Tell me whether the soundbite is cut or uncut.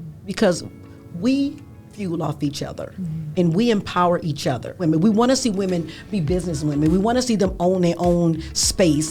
cut